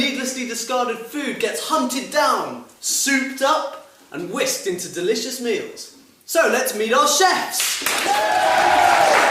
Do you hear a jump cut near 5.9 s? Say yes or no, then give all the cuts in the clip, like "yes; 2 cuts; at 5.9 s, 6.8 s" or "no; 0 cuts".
no; 1 cut; at 2.6 s